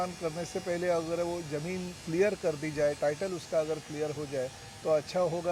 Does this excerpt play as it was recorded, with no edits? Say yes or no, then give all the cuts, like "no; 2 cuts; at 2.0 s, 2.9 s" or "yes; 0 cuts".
yes; 0 cuts